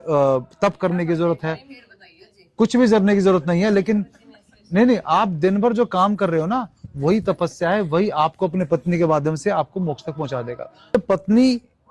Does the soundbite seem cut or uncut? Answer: cut